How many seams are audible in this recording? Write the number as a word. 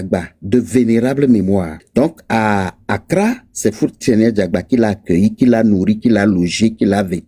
one